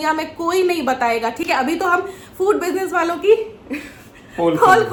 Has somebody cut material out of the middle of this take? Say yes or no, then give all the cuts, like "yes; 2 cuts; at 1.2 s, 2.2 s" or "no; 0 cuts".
no; 0 cuts